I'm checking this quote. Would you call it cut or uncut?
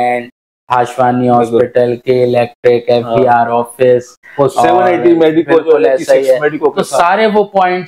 uncut